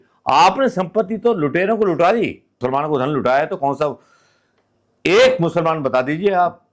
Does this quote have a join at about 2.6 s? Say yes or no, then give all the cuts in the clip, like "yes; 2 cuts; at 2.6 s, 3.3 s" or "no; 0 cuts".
yes; 1 cut; at 2.6 s